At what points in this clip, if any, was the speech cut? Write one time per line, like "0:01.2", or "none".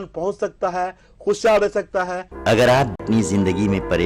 0:02.1
0:03.0